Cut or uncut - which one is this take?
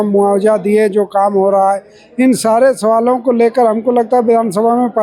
uncut